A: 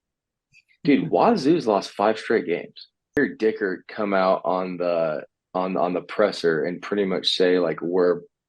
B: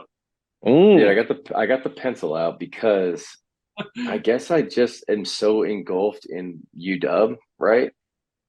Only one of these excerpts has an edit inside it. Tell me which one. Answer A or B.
A